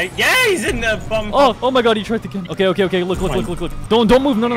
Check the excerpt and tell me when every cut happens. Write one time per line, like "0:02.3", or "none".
0:01.6